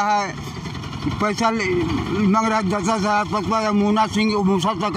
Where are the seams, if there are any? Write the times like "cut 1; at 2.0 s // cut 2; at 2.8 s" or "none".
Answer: none